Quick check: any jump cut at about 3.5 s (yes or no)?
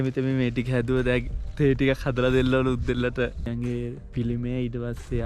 yes